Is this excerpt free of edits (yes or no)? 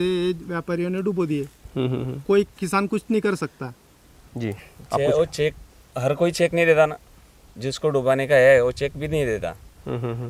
yes